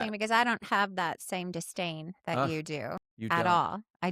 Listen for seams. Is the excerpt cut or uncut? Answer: cut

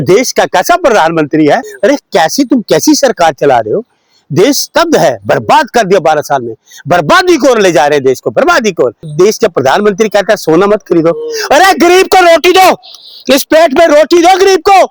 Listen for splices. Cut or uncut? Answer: cut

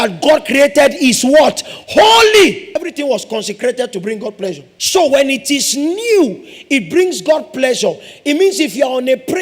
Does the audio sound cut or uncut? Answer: cut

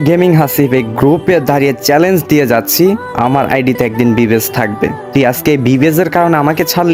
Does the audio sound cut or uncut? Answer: uncut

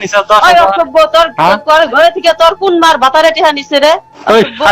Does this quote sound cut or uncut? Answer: uncut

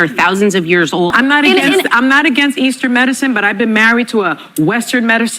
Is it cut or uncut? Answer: cut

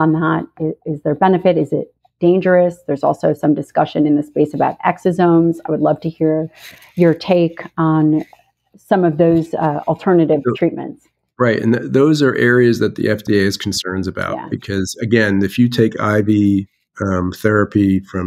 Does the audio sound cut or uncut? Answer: uncut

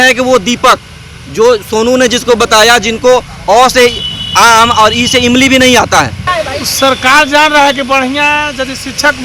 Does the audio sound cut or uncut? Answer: cut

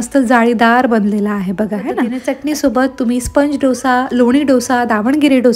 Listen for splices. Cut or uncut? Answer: uncut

